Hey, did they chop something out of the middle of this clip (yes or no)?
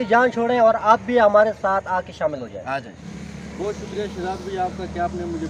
no